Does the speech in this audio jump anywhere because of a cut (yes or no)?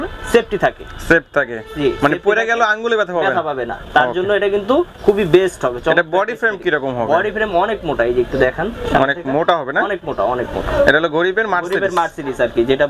no